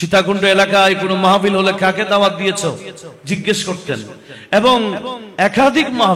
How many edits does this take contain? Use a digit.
0